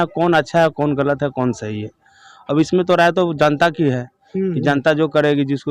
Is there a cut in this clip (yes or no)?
no